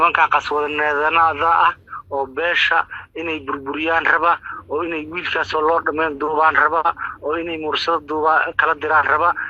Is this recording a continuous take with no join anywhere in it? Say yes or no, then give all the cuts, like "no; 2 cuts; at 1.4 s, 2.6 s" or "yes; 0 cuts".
yes; 0 cuts